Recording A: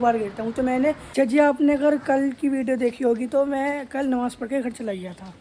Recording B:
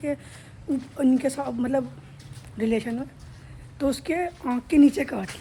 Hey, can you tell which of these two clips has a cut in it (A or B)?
A